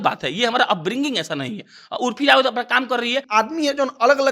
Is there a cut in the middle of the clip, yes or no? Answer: yes